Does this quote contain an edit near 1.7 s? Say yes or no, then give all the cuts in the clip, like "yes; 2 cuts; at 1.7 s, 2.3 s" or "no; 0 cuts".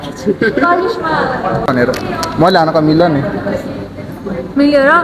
yes; 1 cut; at 1.7 s